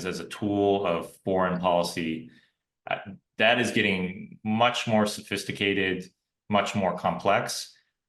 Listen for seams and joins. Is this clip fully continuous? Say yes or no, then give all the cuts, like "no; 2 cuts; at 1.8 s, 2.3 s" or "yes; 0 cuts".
yes; 0 cuts